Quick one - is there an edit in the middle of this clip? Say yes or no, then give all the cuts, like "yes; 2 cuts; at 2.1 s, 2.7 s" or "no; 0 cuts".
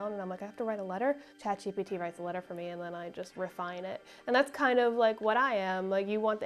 yes; 1 cut; at 1.3 s